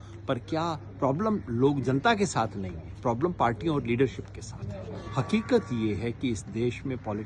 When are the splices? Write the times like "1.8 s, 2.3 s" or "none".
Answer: 5.1 s